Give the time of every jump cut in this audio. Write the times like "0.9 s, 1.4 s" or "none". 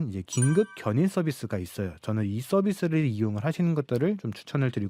none